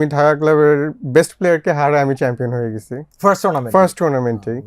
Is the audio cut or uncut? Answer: uncut